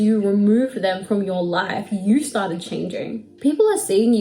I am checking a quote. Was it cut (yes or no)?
yes